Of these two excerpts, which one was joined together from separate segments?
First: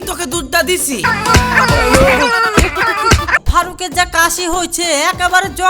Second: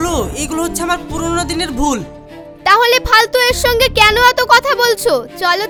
first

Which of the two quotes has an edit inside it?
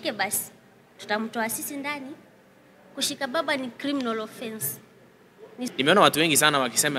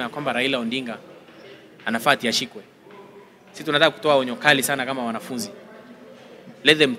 first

